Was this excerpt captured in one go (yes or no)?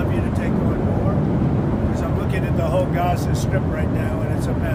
yes